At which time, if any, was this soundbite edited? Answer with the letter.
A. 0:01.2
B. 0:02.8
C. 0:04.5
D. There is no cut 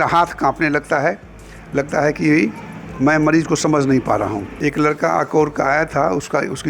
C